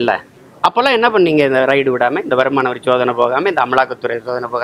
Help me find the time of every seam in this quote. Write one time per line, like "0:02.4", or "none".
none